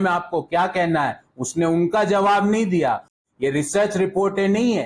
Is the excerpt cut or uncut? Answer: cut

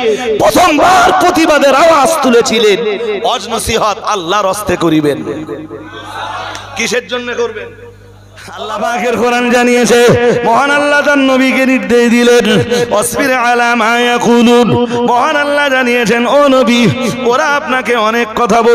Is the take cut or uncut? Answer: cut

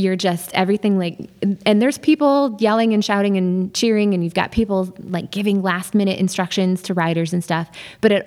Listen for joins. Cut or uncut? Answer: uncut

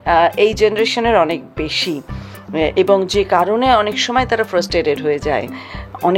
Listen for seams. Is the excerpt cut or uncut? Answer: uncut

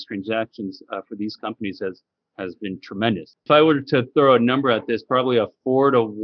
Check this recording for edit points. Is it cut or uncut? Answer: uncut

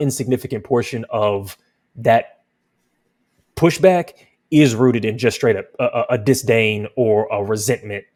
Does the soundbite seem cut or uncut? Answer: uncut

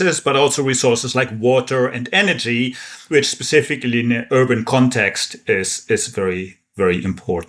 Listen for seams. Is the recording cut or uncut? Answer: uncut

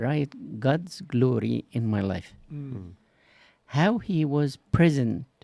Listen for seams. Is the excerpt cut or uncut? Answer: uncut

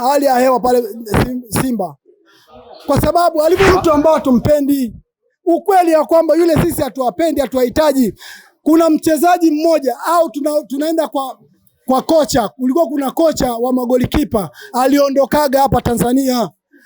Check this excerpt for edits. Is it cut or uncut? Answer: cut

